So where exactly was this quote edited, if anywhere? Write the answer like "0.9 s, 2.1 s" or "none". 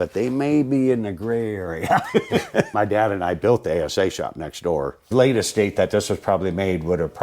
2.7 s, 5.1 s